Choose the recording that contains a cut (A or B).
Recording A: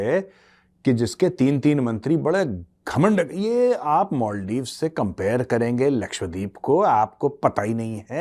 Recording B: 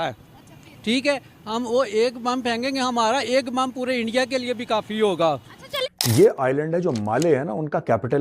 B